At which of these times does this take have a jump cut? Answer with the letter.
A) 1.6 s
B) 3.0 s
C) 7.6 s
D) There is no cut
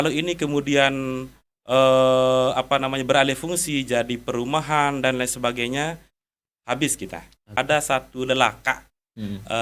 C